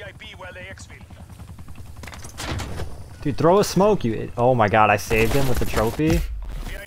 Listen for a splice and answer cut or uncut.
uncut